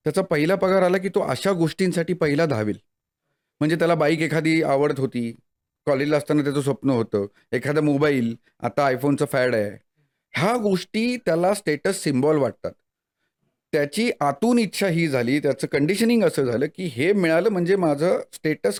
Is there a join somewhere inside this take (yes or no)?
no